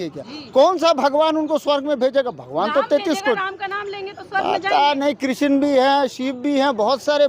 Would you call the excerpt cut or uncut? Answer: uncut